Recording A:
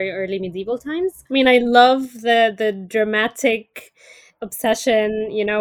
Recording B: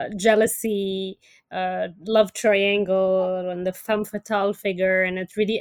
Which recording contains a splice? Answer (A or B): A